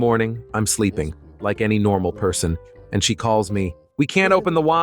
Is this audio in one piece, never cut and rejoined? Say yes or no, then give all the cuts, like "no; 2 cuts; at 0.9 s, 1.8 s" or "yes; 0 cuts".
no; 1 cut; at 3.8 s